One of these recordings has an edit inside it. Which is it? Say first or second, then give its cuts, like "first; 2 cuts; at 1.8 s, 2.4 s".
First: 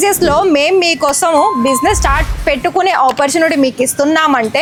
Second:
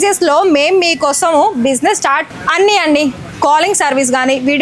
second; 1 cut; at 2.3 s